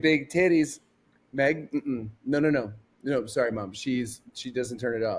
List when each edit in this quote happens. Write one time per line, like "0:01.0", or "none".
none